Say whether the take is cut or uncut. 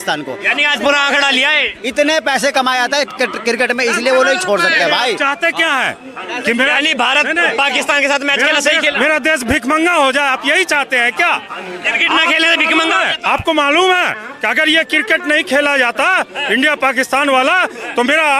uncut